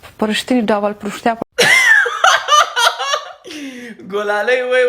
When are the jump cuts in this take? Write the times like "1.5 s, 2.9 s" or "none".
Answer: 1.4 s